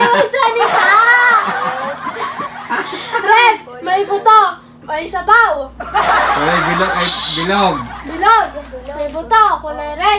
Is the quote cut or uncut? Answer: cut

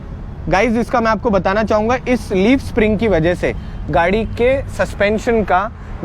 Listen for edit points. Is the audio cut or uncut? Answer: uncut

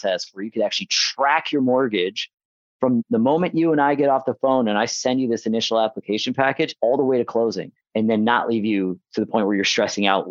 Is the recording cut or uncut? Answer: cut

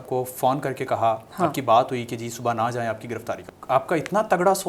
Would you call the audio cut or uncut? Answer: cut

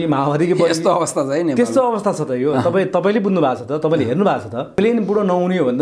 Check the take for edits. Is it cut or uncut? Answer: cut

